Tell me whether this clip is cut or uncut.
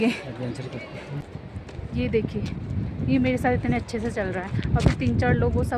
cut